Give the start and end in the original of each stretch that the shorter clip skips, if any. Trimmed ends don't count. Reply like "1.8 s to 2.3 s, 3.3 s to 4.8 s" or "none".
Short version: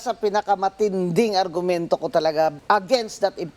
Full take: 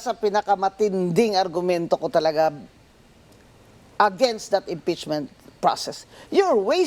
2.6 s to 3.9 s